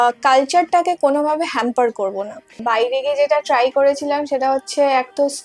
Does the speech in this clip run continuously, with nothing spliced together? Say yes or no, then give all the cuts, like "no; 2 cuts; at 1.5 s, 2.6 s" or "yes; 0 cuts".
no; 1 cut; at 2.6 s